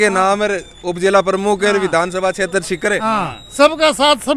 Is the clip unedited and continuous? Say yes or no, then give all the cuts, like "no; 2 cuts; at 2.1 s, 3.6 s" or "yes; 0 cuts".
yes; 0 cuts